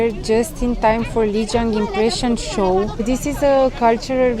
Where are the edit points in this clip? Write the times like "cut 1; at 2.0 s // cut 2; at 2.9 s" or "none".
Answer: cut 1; at 3.0 s